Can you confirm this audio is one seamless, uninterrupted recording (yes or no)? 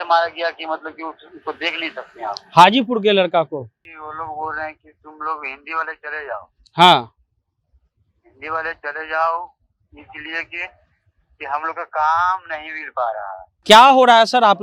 no